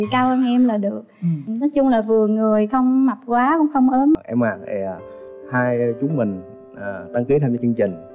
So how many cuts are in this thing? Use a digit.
1